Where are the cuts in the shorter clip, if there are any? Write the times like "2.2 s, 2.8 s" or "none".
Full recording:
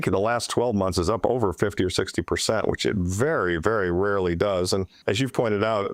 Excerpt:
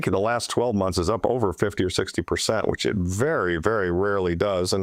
none